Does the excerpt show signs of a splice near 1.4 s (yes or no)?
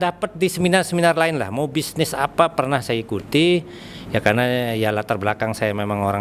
no